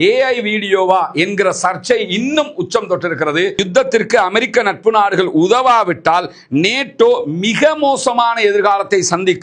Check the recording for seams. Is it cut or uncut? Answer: cut